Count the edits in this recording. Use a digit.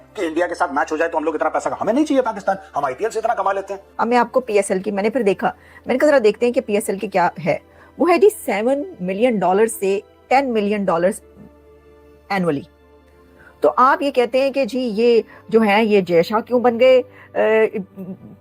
1